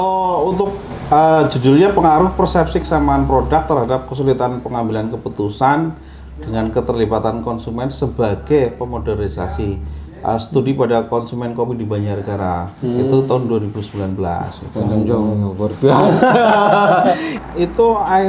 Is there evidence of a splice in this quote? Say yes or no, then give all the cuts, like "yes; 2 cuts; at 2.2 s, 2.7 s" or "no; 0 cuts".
yes; 1 cut; at 17.3 s